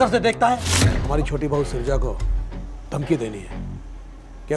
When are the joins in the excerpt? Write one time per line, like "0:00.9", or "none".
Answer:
0:01.0